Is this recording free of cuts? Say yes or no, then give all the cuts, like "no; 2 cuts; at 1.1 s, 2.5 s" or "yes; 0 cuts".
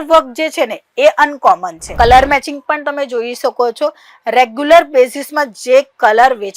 no; 1 cut; at 1.8 s